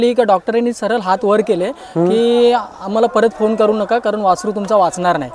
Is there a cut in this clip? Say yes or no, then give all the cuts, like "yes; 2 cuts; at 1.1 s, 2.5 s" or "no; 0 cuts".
no; 0 cuts